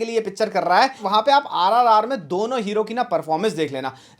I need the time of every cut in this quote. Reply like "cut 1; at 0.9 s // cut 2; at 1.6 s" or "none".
cut 1; at 1.1 s